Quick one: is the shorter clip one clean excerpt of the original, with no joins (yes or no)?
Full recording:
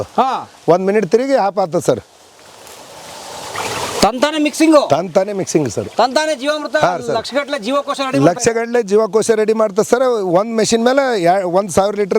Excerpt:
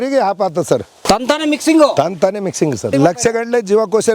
no